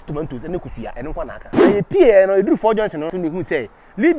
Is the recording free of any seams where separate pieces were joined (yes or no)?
no